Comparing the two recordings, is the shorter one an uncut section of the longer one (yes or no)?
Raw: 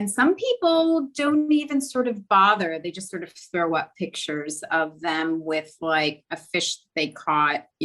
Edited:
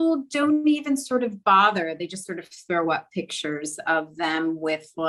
yes